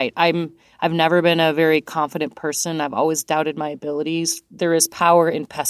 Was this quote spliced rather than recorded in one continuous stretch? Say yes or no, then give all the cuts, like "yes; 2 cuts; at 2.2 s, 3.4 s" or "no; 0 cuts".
yes; 1 cut; at 4.3 s